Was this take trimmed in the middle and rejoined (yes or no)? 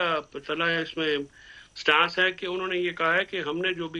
no